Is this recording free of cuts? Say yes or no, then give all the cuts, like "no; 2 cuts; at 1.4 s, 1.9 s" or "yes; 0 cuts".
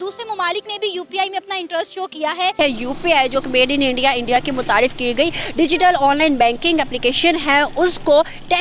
no; 1 cut; at 2.5 s